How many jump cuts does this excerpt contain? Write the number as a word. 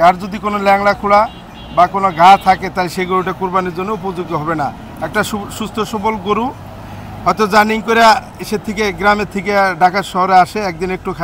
zero